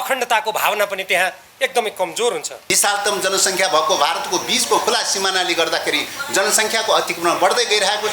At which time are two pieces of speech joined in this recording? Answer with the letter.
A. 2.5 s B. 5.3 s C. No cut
A